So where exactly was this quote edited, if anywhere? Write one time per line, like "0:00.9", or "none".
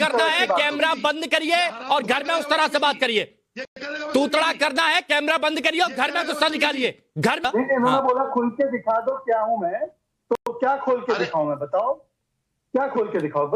0:07.4